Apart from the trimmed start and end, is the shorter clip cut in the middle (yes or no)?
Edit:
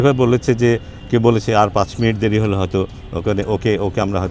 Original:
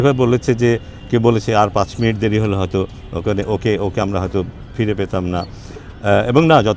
no